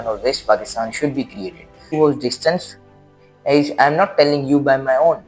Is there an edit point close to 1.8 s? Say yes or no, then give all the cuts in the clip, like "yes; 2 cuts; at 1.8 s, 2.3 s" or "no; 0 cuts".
yes; 1 cut; at 1.8 s